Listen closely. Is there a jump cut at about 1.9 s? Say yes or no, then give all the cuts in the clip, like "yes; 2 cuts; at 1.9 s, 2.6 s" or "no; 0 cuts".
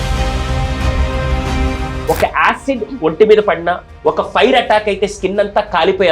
yes; 1 cut; at 1.9 s